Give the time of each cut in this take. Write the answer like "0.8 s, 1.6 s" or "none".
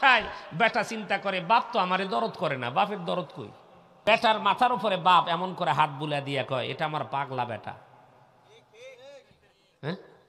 4.0 s